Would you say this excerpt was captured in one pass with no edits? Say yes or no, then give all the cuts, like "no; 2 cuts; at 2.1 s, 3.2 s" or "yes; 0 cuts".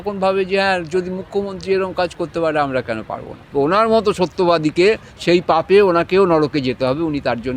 no; 1 cut; at 3.5 s